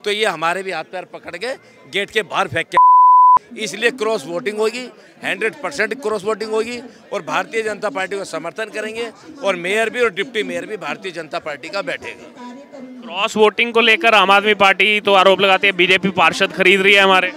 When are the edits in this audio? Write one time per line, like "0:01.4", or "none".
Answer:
none